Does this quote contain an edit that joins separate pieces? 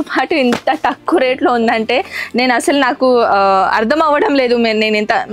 no; 0 cuts

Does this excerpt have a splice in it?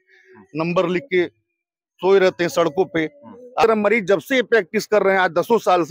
yes; 1 cut; at 3.6 s

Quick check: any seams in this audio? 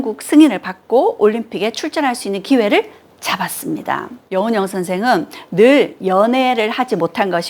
yes; 1 cut; at 4.2 s

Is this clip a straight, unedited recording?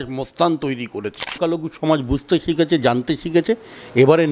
no; 1 cut; at 1.4 s

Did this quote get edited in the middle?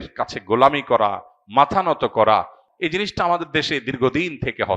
yes; 1 cut; at 2.6 s

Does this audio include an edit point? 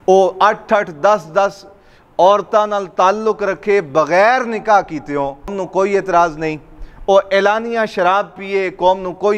yes; 1 cut; at 5.6 s

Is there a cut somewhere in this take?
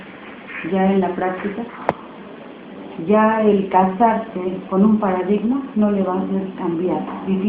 no; 0 cuts

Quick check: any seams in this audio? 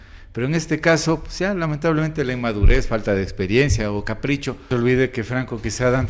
yes; 1 cut; at 4.6 s

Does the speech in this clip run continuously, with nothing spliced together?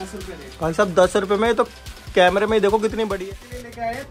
no; 1 cut; at 3.2 s

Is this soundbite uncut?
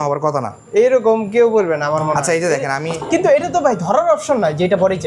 yes; 0 cuts

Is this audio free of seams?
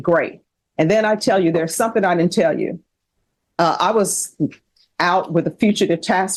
yes; 0 cuts

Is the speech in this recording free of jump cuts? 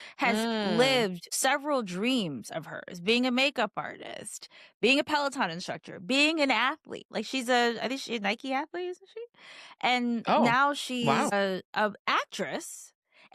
yes; 0 cuts

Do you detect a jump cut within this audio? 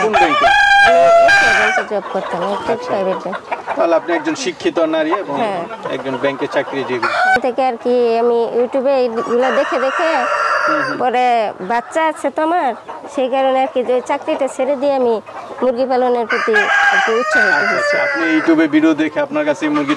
no; 0 cuts

